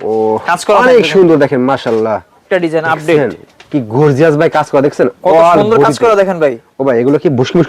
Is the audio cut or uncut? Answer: cut